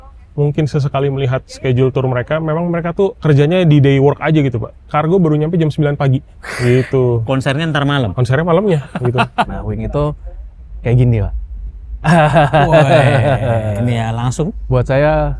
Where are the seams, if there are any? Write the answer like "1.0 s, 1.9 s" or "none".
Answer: 3.2 s, 4.8 s, 9.5 s, 14.6 s

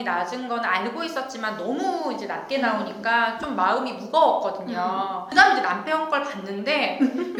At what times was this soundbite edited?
none

